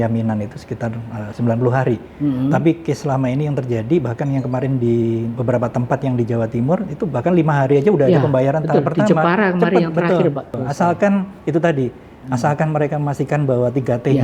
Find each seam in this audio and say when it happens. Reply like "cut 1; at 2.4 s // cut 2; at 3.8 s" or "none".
cut 1; at 10.5 s

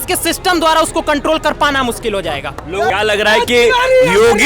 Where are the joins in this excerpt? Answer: cut 1; at 2.9 s

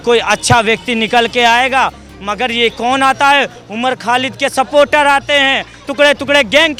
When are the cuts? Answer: none

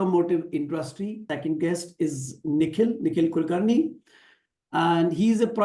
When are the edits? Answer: cut 1; at 1.2 s

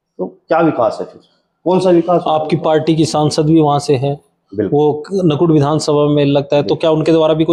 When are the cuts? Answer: none

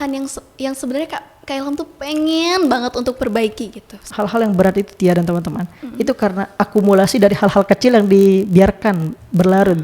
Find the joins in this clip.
cut 1; at 4.0 s

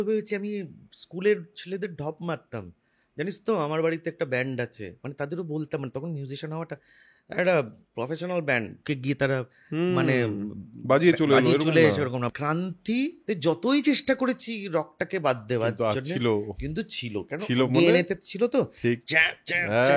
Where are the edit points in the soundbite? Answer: cut 1; at 8.7 s // cut 2; at 12.3 s // cut 3; at 13.2 s

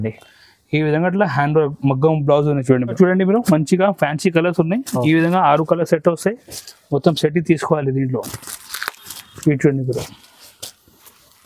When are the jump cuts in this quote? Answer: cut 1; at 2.9 s

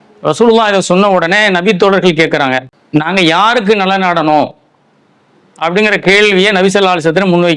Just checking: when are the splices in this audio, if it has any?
cut 1; at 2.7 s

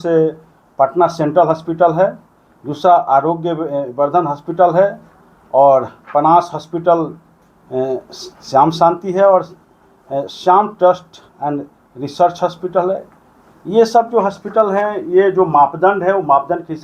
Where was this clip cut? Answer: none

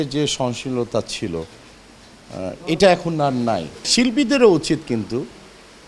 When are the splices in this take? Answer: cut 1; at 3.9 s

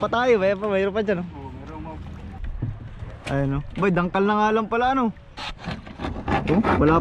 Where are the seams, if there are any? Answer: cut 1; at 2.3 s

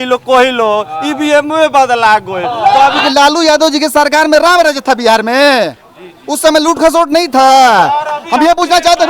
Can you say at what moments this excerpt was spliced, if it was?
cut 1; at 3.1 s

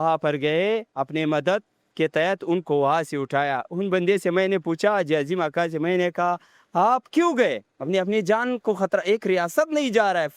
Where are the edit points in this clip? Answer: none

